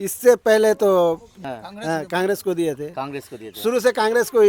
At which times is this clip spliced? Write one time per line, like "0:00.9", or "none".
0:01.3